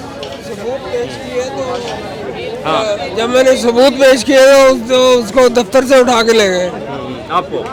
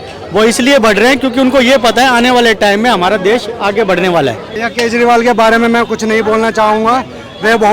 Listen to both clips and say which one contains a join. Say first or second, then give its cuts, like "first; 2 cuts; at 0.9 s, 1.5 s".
second; 1 cut; at 4.5 s